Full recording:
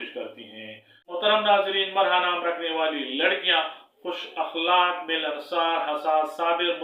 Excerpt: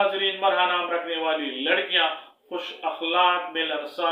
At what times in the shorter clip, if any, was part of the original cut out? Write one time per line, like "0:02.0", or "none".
none

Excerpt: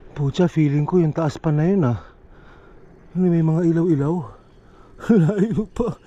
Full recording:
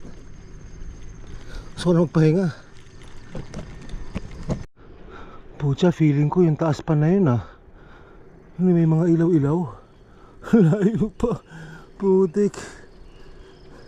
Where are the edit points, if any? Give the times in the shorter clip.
none

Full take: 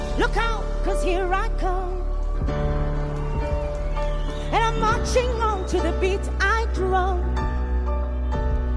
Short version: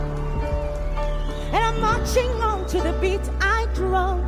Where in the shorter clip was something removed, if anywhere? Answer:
none

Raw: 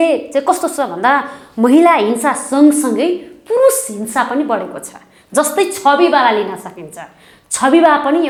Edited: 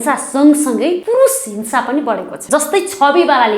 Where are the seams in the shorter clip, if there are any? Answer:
0:01.0
0:02.3

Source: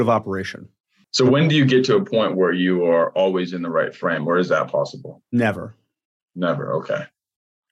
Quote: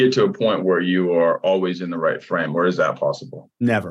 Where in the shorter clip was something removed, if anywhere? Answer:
none

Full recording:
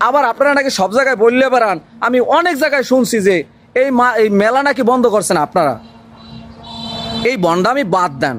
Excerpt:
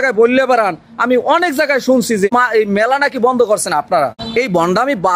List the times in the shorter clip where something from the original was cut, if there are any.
0:02.3
0:04.2

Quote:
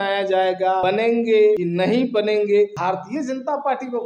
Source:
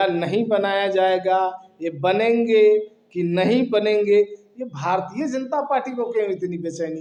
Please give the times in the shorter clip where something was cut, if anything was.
0:00.8
0:01.6
0:02.7

